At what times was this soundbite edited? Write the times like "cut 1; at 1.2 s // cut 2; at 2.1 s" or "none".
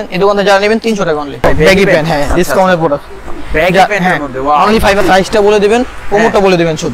cut 1; at 1.4 s // cut 2; at 5.0 s